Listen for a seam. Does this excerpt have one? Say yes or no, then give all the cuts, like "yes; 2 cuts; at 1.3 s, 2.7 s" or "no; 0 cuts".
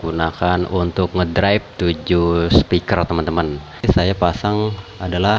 yes; 1 cut; at 3.8 s